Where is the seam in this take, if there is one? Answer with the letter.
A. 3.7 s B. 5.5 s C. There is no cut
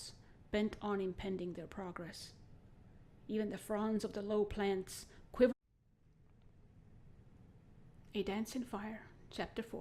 C